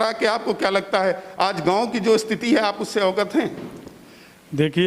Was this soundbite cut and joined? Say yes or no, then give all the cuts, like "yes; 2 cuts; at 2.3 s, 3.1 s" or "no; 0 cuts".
no; 0 cuts